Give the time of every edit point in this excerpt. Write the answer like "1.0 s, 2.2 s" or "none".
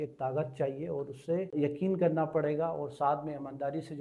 1.5 s